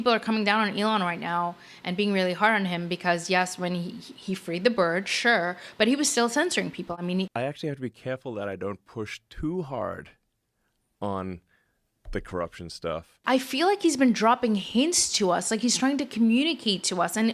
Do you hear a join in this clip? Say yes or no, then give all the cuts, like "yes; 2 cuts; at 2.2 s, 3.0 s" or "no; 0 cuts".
yes; 2 cuts; at 7.3 s, 13.1 s